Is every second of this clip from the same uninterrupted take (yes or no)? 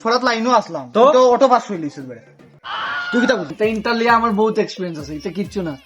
no